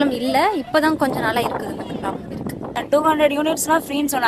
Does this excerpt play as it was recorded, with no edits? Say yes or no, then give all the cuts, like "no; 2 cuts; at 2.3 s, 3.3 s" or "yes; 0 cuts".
no; 1 cut; at 3.0 s